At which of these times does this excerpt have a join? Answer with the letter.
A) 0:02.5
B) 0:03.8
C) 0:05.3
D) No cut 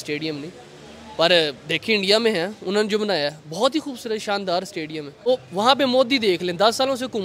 C